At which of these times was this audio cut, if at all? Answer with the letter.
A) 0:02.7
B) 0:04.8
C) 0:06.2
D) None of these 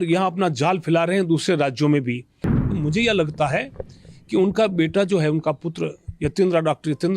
A